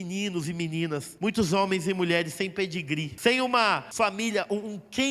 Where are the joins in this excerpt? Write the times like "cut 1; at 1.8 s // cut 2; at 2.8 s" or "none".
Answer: cut 1; at 1.1 s // cut 2; at 3.1 s // cut 3; at 3.9 s

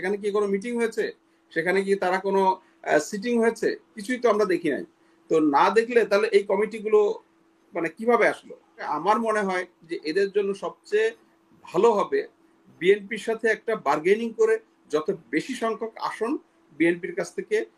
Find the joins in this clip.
cut 1; at 8.9 s

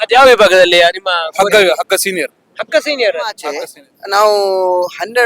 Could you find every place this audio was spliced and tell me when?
cut 1; at 3.4 s

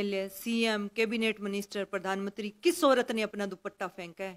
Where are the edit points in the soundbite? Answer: none

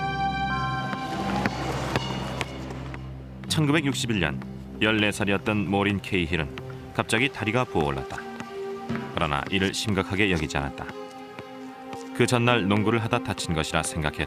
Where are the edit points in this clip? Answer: cut 1; at 10.4 s

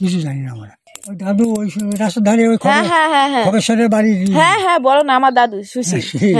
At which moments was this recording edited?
cut 1; at 0.9 s

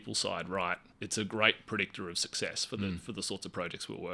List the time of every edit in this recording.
cut 1; at 0.9 s

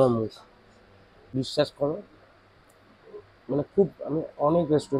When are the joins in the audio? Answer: cut 1; at 1.3 s

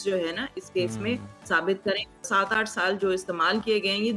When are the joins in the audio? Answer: cut 1; at 2.3 s

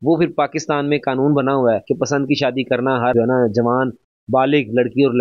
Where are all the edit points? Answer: none

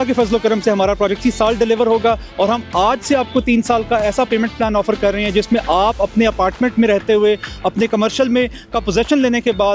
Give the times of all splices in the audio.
cut 1; at 1.2 s

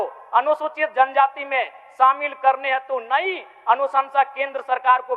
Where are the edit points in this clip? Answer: none

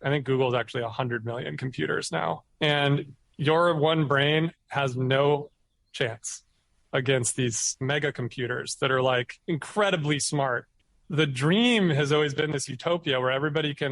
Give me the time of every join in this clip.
cut 1; at 10.7 s

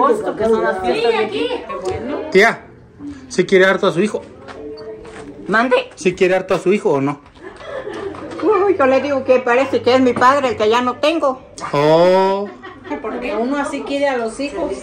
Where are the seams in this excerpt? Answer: cut 1; at 1.7 s // cut 2; at 12.9 s

